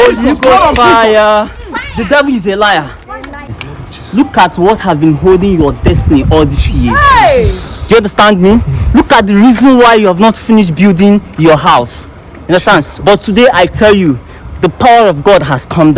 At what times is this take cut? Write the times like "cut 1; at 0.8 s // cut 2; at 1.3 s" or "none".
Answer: cut 1; at 3.5 s